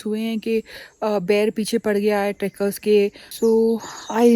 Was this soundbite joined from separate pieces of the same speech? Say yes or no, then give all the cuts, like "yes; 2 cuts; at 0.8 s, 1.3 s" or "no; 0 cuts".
yes; 1 cut; at 3.2 s